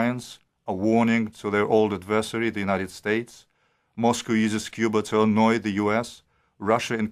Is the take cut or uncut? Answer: uncut